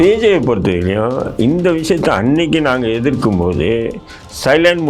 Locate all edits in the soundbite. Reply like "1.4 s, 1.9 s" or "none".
none